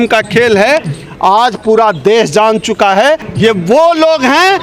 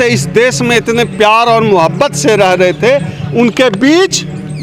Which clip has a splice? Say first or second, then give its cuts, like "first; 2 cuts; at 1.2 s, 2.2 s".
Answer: first; 1 cut; at 3.3 s